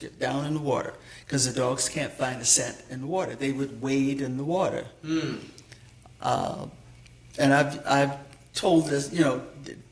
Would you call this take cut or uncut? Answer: uncut